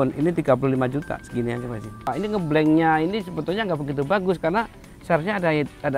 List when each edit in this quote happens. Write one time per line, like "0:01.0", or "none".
0:02.1